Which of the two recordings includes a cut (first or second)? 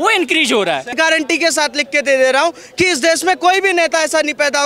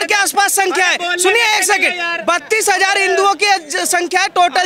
first